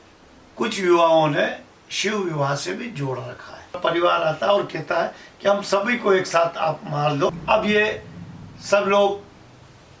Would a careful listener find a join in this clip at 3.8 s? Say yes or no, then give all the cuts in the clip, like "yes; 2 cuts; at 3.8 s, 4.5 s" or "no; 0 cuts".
yes; 2 cuts; at 3.8 s, 7.4 s